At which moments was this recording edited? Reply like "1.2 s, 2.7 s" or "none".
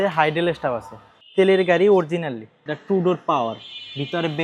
none